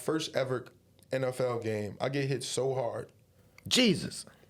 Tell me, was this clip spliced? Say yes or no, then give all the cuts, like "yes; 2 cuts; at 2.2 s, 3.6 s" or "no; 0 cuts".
no; 0 cuts